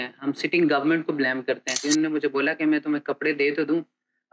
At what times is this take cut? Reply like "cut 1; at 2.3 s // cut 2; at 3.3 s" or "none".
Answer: cut 1; at 1.8 s